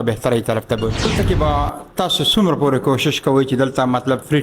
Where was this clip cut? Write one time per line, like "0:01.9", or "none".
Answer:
0:01.1